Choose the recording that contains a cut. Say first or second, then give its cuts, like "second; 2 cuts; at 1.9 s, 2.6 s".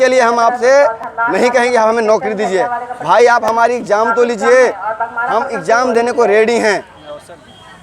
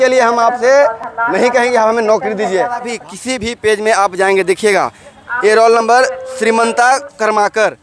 second; 1 cut; at 2.9 s